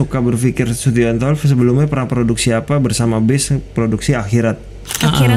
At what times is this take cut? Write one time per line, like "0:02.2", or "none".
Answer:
none